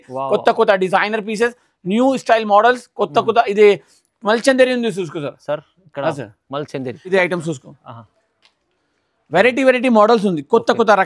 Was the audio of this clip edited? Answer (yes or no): yes